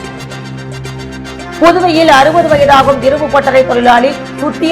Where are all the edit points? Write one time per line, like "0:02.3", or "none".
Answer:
0:01.0

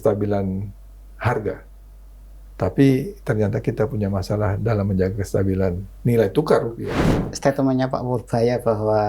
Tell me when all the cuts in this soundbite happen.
0:07.3

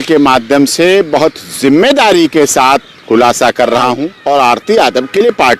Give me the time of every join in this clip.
0:04.1

